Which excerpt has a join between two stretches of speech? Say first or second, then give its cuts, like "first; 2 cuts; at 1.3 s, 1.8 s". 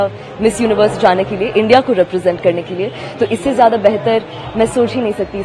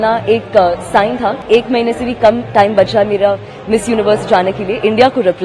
second; 1 cut; at 1.4 s